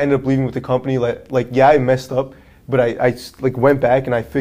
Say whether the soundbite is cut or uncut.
uncut